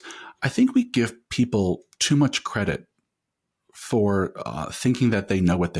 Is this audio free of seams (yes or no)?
yes